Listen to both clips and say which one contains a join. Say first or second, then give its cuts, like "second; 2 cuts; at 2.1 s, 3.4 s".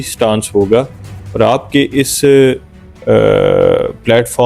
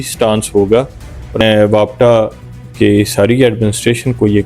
second; 1 cut; at 1.4 s